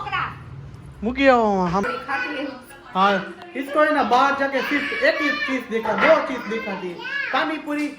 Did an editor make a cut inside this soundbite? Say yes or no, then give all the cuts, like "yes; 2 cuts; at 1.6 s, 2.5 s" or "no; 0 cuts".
yes; 1 cut; at 1.8 s